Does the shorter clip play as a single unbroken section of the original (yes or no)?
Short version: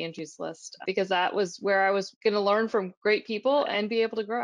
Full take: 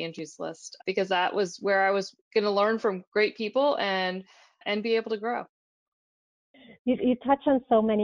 no